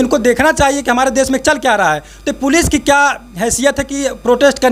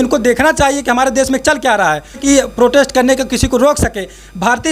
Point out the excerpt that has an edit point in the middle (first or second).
second